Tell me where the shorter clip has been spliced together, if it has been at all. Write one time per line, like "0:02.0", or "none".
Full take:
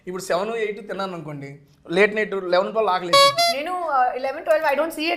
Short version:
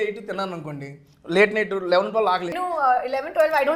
0:02.5